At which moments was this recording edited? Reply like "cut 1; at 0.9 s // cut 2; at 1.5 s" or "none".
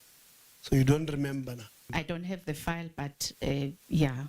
cut 1; at 1.8 s